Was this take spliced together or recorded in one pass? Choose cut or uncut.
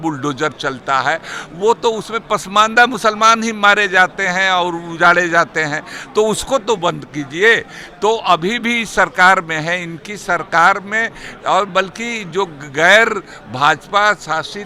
uncut